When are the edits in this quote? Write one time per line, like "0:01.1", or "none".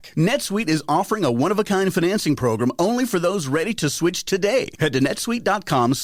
none